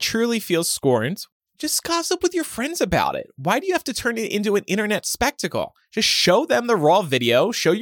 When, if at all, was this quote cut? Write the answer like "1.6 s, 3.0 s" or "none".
1.2 s